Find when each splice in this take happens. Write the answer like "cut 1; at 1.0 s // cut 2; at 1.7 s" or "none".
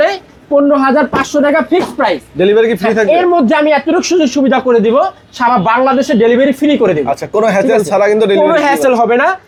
none